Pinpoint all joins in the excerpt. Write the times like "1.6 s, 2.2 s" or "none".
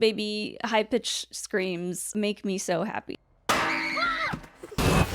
2.0 s, 3.1 s